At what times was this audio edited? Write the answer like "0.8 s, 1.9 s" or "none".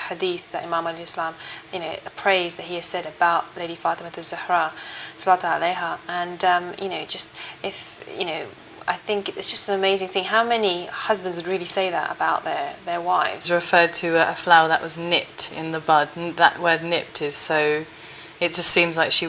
none